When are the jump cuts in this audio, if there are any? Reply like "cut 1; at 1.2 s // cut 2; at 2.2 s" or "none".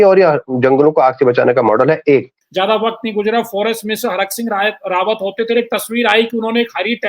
cut 1; at 2.4 s